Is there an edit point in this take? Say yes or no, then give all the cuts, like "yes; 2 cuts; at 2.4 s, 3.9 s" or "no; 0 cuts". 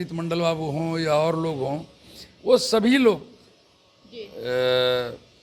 no; 0 cuts